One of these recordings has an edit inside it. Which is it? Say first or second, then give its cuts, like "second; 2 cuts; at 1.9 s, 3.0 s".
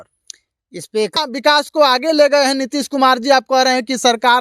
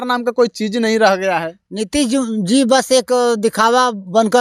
first; 1 cut; at 1.1 s